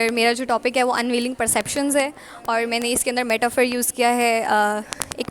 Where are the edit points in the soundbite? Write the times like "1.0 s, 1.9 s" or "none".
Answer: none